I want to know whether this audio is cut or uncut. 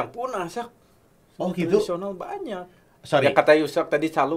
uncut